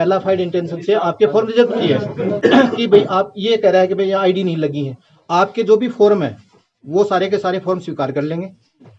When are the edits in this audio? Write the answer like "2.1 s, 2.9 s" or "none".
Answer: 2.3 s